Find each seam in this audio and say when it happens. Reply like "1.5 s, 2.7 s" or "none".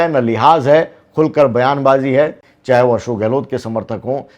2.4 s